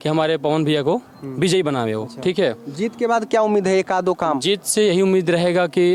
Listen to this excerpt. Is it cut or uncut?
uncut